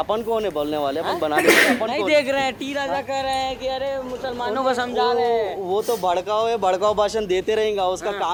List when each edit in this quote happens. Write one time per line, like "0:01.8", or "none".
none